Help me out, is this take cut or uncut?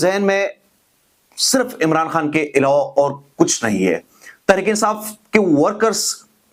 uncut